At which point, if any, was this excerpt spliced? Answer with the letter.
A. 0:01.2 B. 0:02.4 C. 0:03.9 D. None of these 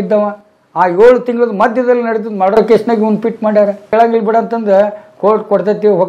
C